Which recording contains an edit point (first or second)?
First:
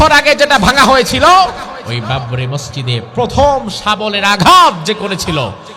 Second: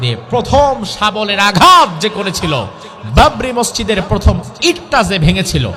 first